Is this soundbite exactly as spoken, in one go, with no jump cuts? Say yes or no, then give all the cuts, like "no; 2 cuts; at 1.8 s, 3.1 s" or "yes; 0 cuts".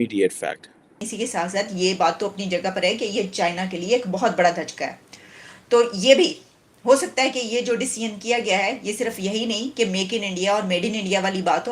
no; 1 cut; at 1.0 s